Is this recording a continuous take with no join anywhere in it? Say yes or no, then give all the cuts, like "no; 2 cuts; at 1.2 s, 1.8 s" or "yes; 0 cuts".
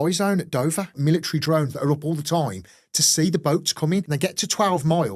no; 2 cuts; at 1.4 s, 4.1 s